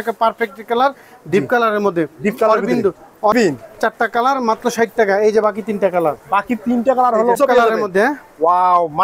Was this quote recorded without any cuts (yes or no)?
no